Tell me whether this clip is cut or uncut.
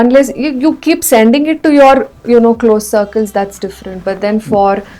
uncut